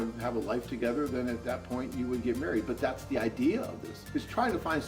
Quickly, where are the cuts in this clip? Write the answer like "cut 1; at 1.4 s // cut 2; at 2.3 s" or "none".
cut 1; at 4.0 s

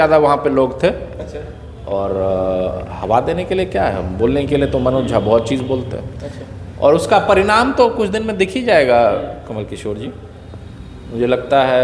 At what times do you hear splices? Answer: none

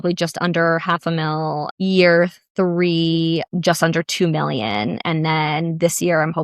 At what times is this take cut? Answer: cut 1; at 1.7 s // cut 2; at 3.5 s

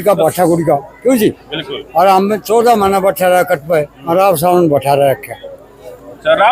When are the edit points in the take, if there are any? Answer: none

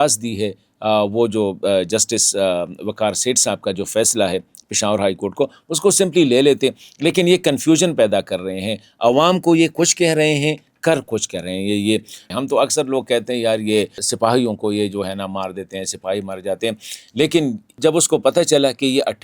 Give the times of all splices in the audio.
cut 1; at 12.2 s // cut 2; at 14.0 s // cut 3; at 17.8 s

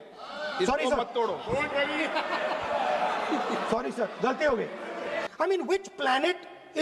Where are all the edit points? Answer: cut 1; at 5.2 s

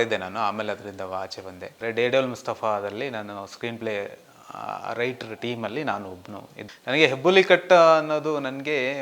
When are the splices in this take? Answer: cut 1; at 1.8 s // cut 2; at 6.6 s

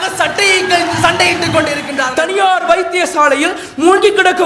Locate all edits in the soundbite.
cut 1; at 2.0 s

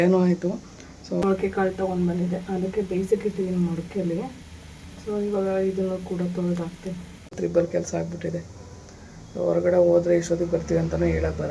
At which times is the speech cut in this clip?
cut 1; at 1.2 s // cut 2; at 7.4 s

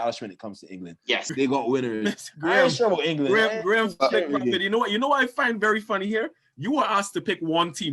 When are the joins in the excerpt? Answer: cut 1; at 1.3 s

